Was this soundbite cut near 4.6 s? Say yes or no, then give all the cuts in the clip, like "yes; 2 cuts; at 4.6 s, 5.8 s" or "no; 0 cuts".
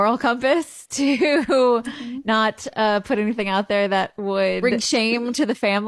yes; 1 cut; at 4.6 s